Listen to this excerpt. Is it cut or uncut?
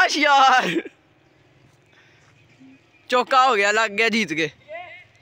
uncut